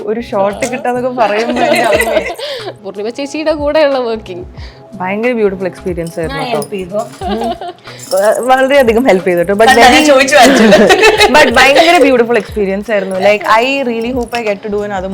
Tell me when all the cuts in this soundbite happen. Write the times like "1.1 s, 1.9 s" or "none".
2.7 s